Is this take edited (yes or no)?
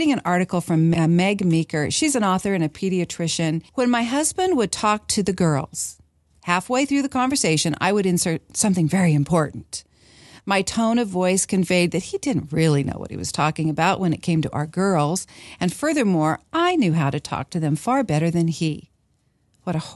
yes